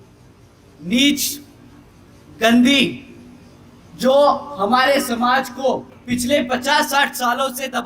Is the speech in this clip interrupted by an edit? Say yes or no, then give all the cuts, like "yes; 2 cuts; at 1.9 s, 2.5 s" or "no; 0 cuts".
yes; 1 cut; at 5.9 s